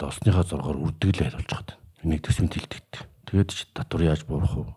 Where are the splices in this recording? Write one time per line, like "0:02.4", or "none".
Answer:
none